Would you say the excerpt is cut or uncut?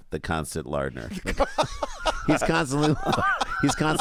uncut